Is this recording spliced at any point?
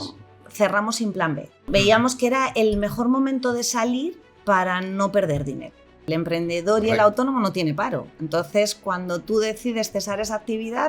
yes; 2 cuts; at 1.5 s, 6.0 s

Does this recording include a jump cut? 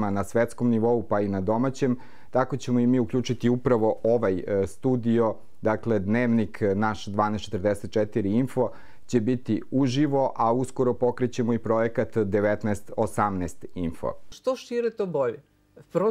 yes; 1 cut; at 14.3 s

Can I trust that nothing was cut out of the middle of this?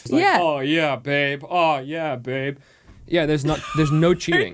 yes; 0 cuts

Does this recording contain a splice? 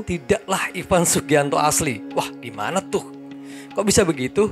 no; 0 cuts

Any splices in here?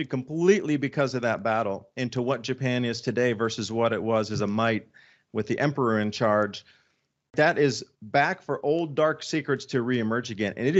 no; 0 cuts

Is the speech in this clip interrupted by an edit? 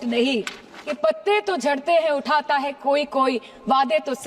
yes; 1 cut; at 1.0 s

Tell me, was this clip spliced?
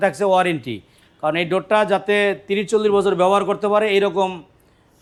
no; 0 cuts

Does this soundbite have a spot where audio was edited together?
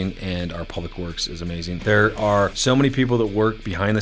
yes; 2 cuts; at 1.8 s, 2.6 s

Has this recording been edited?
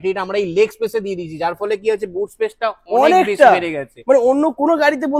no; 0 cuts

